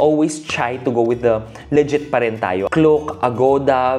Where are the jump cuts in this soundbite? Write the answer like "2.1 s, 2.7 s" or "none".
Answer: 2.6 s